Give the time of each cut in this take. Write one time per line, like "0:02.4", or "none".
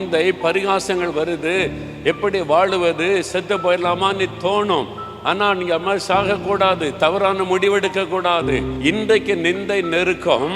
0:08.7